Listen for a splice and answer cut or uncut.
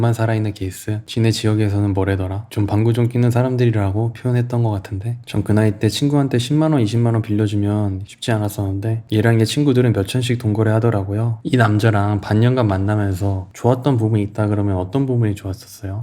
cut